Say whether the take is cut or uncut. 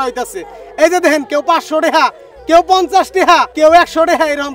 cut